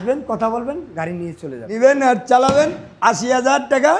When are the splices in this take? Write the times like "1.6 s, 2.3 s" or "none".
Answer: 1.6 s

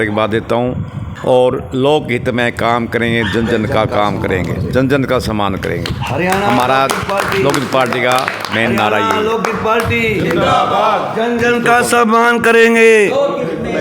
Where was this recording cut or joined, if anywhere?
1.0 s

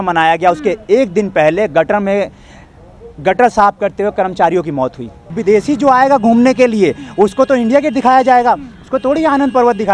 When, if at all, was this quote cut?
5.4 s

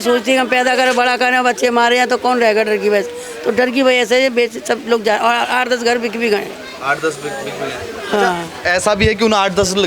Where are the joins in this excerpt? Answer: none

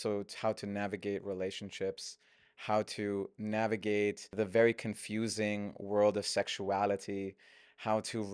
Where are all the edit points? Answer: 4.3 s

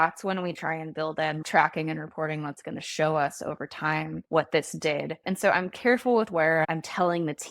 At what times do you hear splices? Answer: 1.4 s, 4.2 s, 5.2 s, 6.6 s

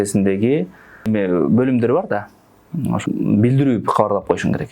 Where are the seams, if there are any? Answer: 1.1 s, 3.0 s

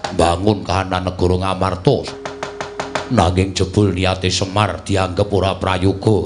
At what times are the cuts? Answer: 2.1 s

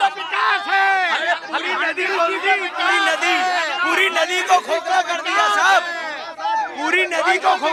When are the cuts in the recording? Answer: none

